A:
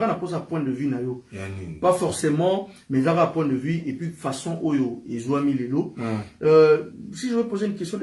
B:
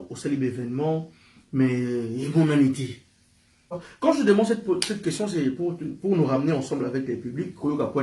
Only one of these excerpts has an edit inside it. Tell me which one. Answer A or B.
B